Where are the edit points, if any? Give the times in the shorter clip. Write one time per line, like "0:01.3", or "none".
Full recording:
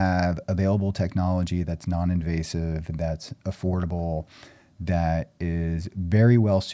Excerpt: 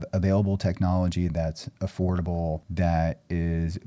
0:01.3
0:02.7